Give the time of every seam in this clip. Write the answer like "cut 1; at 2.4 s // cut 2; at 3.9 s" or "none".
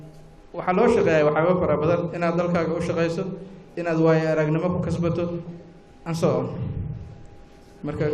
cut 1; at 4.8 s